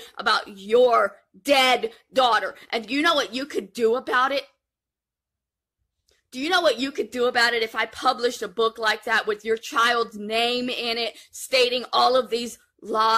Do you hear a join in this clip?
no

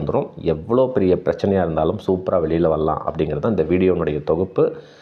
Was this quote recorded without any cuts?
yes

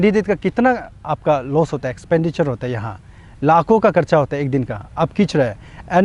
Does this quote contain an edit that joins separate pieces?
no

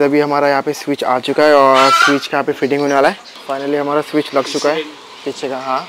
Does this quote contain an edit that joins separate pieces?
no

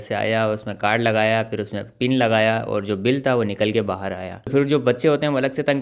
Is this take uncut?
no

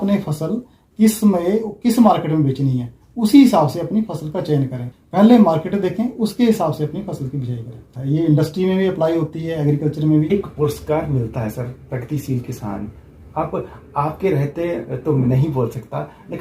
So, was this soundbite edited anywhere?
yes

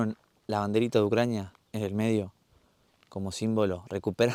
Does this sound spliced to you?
no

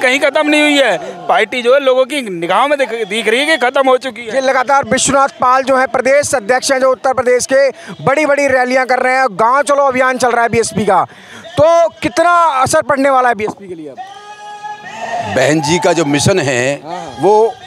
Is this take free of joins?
yes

